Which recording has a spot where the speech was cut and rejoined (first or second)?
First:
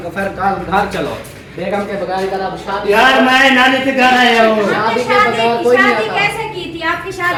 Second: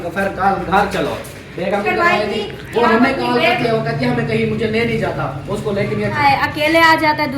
second